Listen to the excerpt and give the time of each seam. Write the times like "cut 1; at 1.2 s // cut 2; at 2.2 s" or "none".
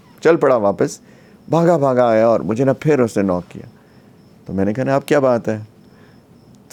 none